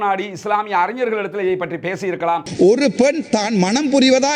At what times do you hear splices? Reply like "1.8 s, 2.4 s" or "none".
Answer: 2.5 s